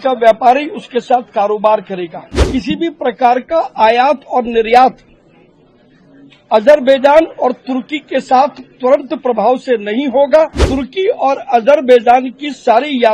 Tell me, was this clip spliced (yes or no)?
yes